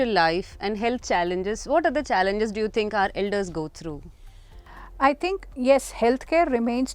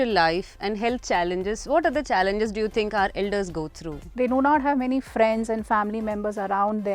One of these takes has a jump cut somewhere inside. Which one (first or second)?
second